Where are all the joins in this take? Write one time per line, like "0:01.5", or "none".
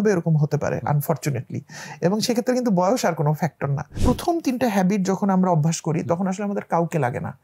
0:04.0